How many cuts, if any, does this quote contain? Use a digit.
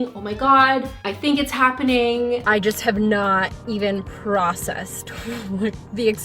1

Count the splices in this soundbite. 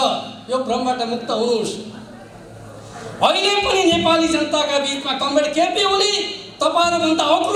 0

